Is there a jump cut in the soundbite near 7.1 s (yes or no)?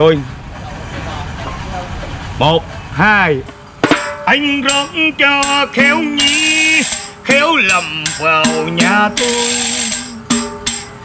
no